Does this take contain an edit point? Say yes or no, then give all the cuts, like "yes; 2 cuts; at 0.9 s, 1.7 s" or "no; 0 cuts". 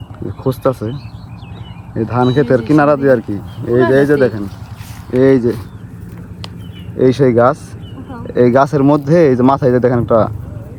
no; 0 cuts